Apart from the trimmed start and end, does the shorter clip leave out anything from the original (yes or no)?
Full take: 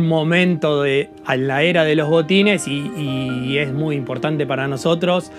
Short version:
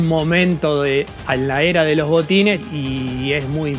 yes